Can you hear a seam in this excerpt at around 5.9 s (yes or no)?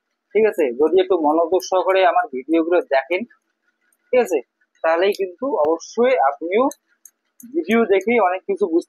no